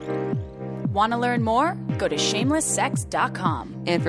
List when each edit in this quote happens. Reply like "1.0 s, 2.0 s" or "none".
0.9 s

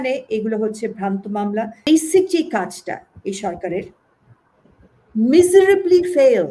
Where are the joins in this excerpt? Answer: 1.9 s

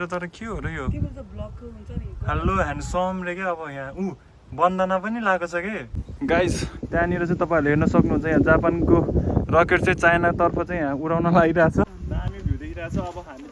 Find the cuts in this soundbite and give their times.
6.0 s, 11.9 s

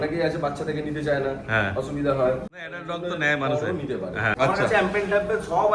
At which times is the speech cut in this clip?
2.7 s, 4.3 s

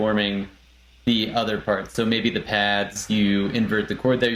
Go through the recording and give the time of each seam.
none

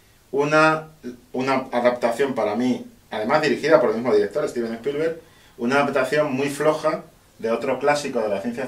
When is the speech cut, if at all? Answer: none

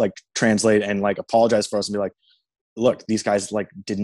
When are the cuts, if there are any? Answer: none

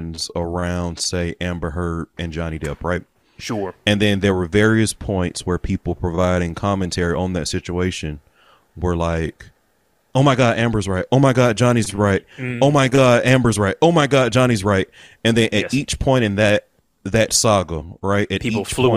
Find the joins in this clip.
none

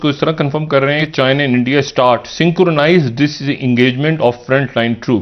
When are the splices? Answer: none

